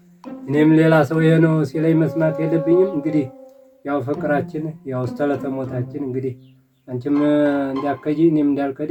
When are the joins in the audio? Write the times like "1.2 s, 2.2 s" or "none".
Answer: none